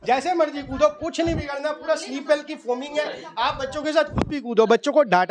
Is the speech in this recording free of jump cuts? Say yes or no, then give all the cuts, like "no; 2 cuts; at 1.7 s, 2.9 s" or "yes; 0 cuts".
yes; 0 cuts